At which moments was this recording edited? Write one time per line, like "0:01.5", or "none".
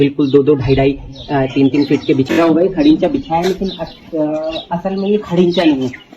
0:02.3